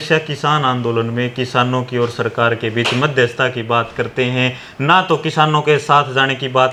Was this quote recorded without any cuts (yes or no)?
yes